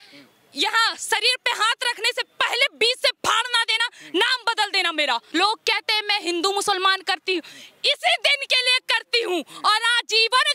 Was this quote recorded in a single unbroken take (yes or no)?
no